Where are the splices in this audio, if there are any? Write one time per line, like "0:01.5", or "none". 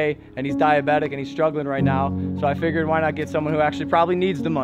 none